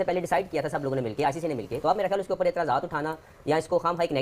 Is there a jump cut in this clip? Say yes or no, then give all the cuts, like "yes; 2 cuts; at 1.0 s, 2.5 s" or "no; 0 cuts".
yes; 1 cut; at 1.7 s